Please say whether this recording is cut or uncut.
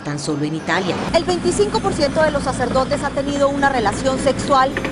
cut